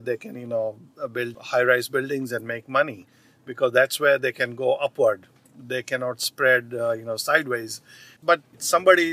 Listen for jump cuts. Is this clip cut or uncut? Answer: cut